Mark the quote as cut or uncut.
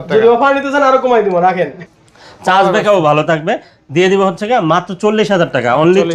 cut